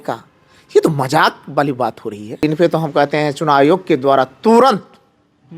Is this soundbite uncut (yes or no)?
no